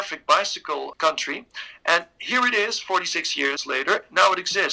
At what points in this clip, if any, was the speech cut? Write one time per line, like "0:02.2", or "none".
0:00.9
0:03.6